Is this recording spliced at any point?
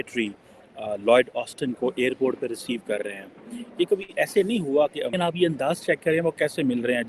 yes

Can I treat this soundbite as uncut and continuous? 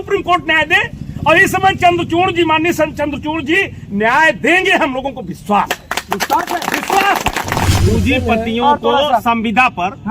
no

